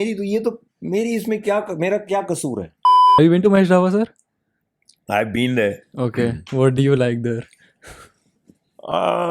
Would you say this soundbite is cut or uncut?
cut